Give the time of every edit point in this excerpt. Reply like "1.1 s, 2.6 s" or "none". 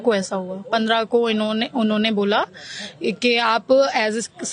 none

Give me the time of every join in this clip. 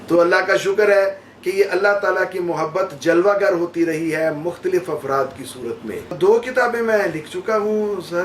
6.2 s

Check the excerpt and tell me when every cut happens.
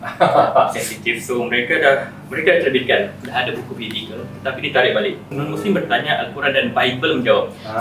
5.3 s

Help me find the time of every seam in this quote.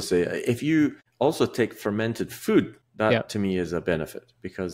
1.0 s, 2.8 s

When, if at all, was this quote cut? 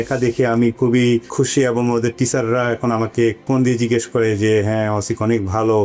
none

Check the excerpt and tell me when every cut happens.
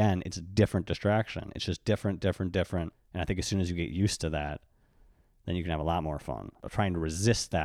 3.0 s, 6.7 s

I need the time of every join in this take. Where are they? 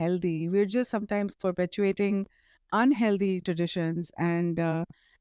none

